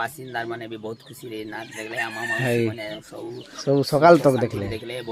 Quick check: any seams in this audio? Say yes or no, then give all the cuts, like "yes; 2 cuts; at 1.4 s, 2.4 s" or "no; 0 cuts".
no; 0 cuts